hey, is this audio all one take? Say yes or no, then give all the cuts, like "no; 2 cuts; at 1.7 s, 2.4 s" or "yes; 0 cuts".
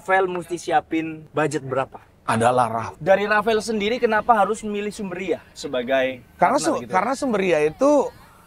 no; 2 cuts; at 1.2 s, 2.9 s